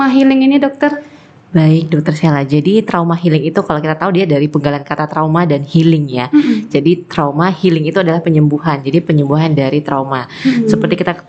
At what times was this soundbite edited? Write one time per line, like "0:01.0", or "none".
none